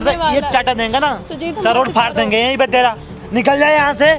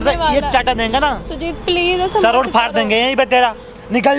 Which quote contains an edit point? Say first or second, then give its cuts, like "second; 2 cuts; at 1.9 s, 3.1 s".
first; 1 cut; at 1.6 s